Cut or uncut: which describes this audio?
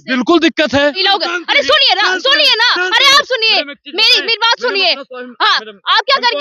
cut